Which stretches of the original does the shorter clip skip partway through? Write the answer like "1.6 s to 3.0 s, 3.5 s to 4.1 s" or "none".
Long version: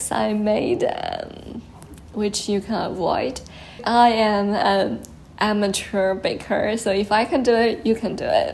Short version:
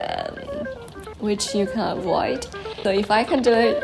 3.7 s to 6.8 s